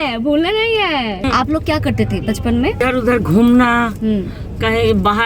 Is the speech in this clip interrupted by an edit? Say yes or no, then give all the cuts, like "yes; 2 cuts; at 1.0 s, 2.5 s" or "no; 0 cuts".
yes; 2 cuts; at 1.2 s, 2.8 s